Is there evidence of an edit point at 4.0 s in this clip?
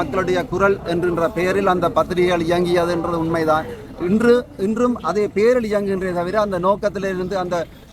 no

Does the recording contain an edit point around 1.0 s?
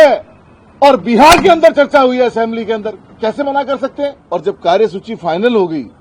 no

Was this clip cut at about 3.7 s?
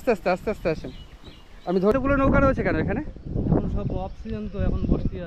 no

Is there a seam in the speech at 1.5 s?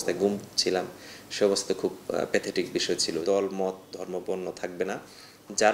no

